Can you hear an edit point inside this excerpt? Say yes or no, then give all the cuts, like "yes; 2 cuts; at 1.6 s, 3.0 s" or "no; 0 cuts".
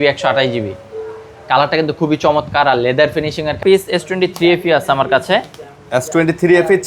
yes; 1 cut; at 3.6 s